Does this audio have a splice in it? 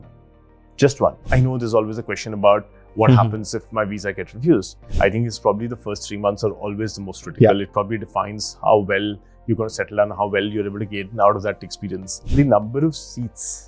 yes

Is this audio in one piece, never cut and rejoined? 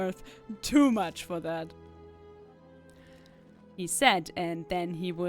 yes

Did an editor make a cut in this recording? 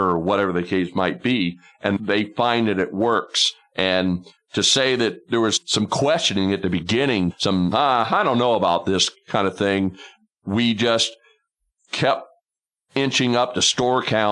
no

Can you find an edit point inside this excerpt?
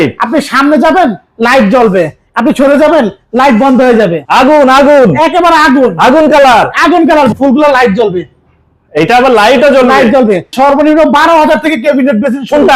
yes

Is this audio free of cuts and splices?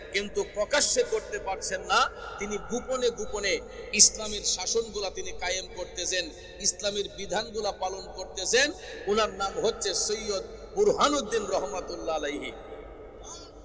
yes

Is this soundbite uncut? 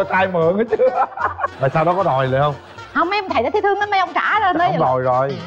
no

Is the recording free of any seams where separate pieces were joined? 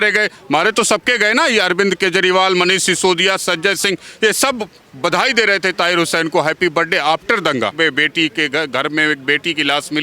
no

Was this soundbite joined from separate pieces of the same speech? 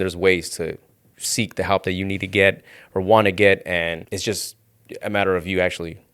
yes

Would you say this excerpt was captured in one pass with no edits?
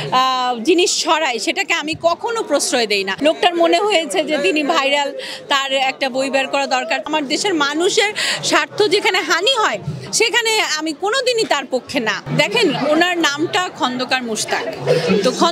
no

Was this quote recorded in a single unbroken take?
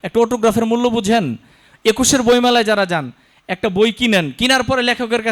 yes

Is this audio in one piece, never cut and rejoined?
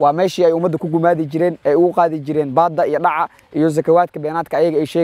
yes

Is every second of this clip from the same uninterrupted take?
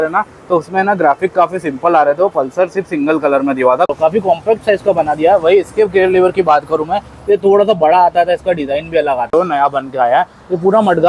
no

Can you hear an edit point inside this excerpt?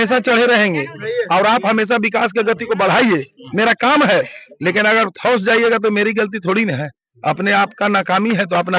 no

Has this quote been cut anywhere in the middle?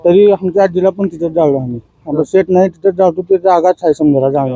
no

